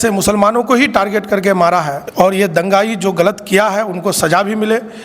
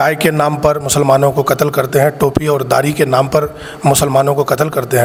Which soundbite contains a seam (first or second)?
first